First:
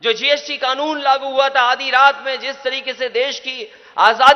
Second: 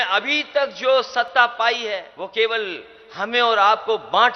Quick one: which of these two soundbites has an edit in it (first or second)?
second